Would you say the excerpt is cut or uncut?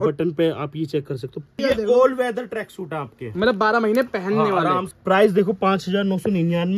cut